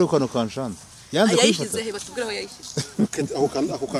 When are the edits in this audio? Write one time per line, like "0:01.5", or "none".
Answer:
0:02.6